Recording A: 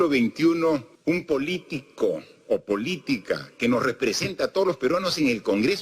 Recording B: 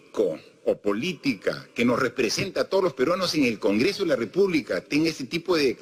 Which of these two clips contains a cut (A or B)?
A